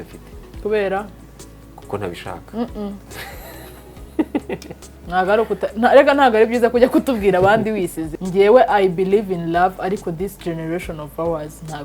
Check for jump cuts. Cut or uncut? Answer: cut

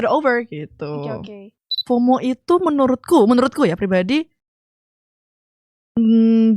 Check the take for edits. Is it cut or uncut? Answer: cut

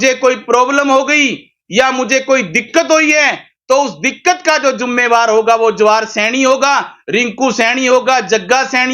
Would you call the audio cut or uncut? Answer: uncut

